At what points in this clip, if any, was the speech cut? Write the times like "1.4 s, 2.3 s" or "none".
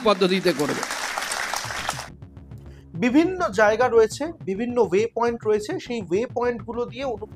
none